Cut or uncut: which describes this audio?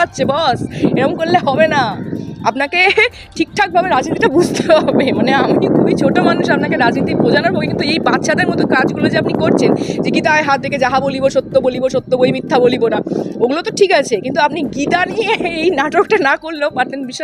uncut